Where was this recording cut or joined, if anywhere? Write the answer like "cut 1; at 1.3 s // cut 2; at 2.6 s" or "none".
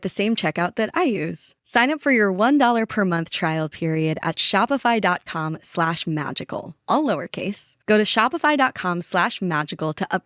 none